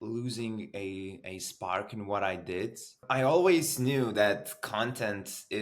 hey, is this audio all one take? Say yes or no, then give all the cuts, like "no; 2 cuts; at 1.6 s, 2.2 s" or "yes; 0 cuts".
no; 1 cut; at 3.0 s